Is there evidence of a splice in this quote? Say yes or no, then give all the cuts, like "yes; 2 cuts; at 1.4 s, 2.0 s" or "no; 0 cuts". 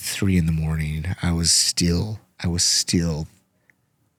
no; 0 cuts